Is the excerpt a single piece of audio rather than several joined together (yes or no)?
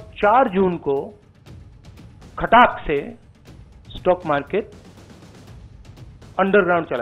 no